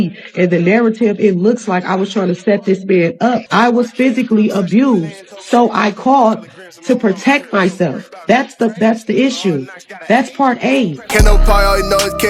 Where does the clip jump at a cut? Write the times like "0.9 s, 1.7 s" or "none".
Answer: 3.4 s, 11.0 s